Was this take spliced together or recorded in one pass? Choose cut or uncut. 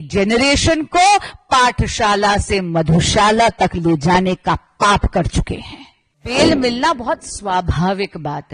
cut